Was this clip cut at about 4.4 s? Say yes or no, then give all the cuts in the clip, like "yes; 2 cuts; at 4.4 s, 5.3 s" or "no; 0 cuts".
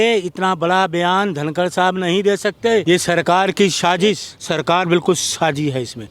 yes; 2 cuts; at 2.8 s, 4.4 s